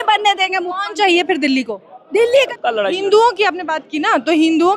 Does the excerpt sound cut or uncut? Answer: cut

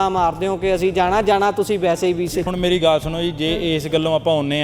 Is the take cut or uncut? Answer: cut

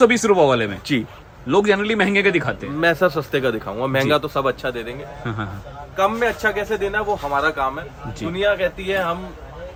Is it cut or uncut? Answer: uncut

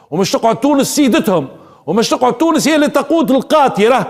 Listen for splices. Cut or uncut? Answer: uncut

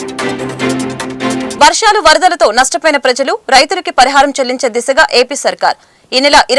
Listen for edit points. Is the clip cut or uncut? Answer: cut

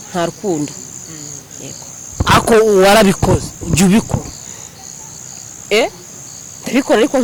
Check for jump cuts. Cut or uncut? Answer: uncut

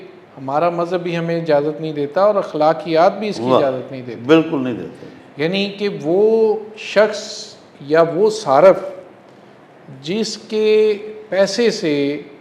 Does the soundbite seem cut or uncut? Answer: uncut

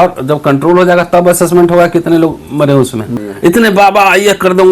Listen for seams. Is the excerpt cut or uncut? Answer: cut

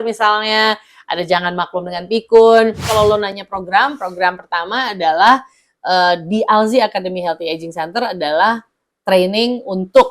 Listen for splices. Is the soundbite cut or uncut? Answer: cut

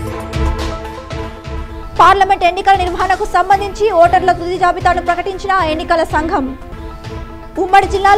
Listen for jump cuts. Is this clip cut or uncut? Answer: uncut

